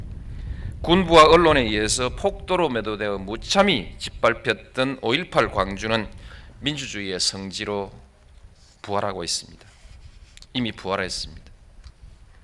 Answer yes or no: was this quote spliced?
yes